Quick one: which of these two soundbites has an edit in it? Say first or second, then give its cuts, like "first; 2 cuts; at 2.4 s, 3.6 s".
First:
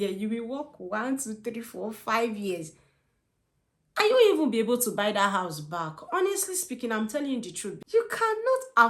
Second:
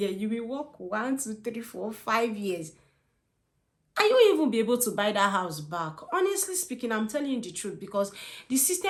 first; 1 cut; at 7.7 s